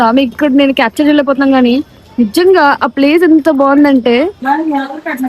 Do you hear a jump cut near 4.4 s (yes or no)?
yes